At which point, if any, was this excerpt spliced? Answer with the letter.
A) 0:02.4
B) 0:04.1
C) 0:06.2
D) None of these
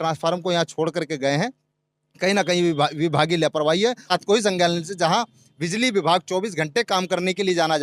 B